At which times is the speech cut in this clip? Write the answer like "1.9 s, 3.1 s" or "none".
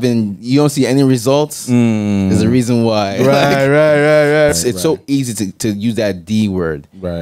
4.5 s